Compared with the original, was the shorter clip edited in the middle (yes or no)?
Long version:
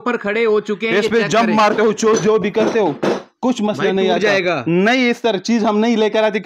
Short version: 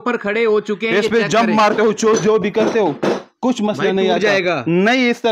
no